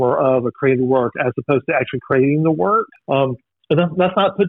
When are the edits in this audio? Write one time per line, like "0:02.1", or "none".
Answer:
0:02.9